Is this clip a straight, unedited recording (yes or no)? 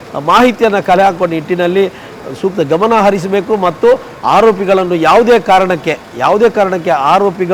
yes